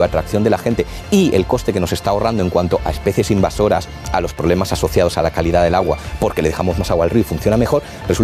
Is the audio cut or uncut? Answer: uncut